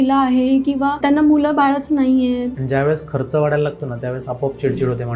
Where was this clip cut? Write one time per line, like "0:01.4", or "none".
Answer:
0:01.0
0:02.6